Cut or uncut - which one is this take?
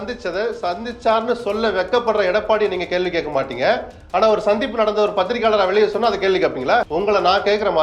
cut